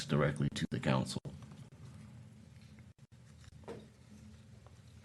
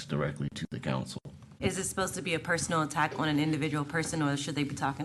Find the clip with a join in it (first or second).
second